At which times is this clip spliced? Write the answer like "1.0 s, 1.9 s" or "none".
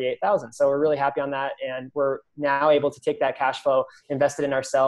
none